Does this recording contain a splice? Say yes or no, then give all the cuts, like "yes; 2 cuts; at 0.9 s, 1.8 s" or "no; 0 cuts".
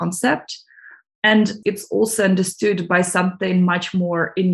no; 0 cuts